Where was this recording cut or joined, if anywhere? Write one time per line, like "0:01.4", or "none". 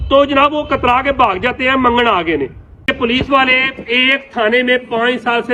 0:02.9